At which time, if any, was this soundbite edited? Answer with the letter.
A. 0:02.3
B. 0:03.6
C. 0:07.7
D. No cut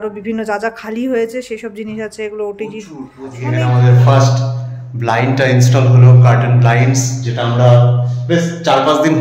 B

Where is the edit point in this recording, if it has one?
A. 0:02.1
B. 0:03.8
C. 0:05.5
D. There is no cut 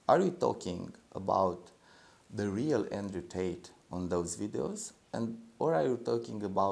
D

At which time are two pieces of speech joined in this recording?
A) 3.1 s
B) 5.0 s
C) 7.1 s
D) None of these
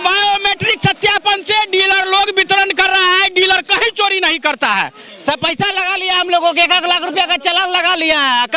B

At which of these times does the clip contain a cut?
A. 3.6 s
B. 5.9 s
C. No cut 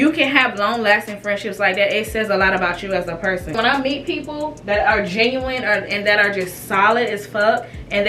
A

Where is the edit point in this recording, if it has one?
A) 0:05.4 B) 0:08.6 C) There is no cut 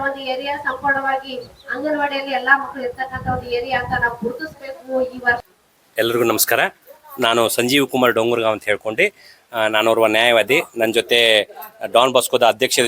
A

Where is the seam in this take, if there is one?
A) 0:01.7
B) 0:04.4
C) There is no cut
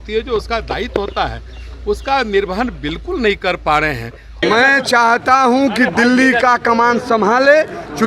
B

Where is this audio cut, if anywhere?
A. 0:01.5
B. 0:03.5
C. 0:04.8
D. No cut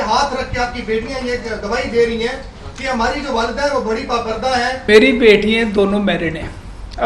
C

